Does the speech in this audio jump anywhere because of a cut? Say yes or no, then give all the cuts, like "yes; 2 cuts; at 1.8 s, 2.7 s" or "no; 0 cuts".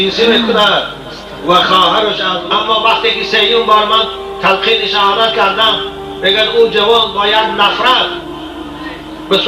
yes; 1 cut; at 2.3 s